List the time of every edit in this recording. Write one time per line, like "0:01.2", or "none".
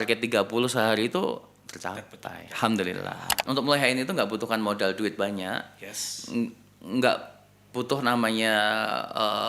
0:03.4